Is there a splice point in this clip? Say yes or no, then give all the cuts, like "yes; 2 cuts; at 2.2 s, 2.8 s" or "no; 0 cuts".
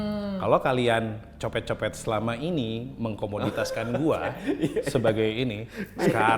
no; 0 cuts